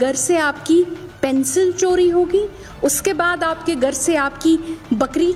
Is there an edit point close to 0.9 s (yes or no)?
no